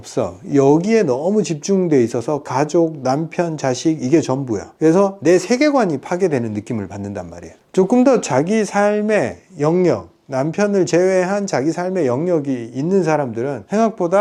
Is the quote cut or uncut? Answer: uncut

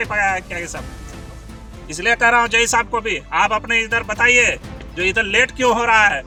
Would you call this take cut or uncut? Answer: uncut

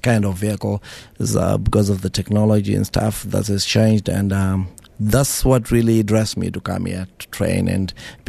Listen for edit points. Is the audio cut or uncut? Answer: uncut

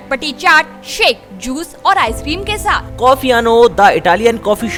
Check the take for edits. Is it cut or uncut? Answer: uncut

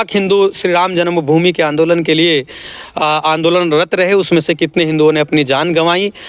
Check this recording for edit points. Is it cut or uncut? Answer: uncut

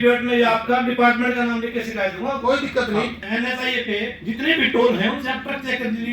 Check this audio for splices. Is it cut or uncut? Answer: cut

